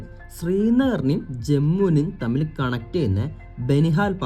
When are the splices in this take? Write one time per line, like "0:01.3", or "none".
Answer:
none